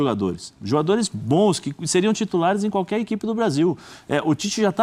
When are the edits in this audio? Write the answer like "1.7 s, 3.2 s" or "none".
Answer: none